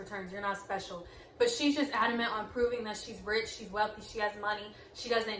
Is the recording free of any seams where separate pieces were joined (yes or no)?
yes